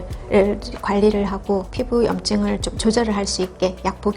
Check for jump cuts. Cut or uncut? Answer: cut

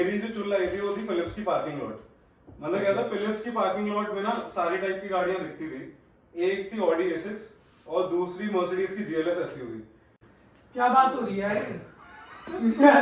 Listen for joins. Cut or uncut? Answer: cut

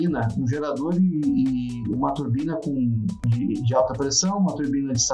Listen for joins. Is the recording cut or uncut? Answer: cut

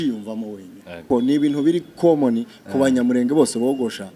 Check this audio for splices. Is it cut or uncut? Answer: cut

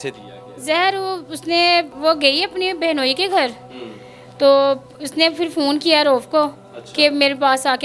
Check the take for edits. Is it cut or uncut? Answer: uncut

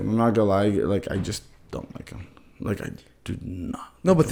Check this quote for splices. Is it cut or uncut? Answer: uncut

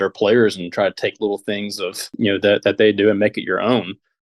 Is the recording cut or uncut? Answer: uncut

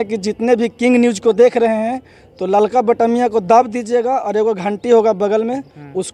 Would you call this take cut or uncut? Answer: uncut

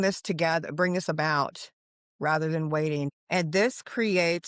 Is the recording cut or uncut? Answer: cut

